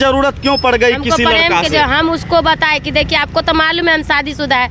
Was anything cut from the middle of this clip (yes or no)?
no